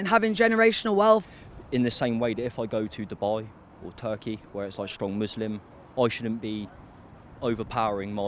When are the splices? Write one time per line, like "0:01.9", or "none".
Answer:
0:01.2